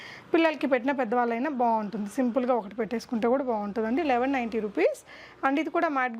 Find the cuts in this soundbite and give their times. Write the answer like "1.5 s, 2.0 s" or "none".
none